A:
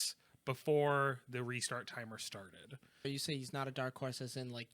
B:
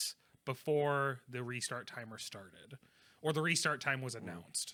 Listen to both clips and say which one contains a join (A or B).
A